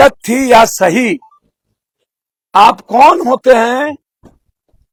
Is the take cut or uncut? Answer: uncut